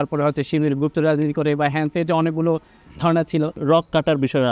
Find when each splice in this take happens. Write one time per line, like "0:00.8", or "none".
0:03.6